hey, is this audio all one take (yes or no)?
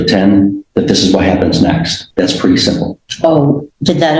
no